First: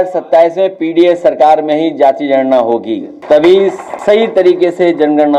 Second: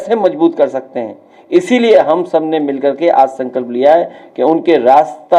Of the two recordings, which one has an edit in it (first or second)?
first